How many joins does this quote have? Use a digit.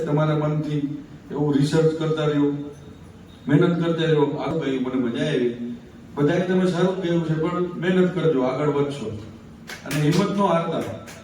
1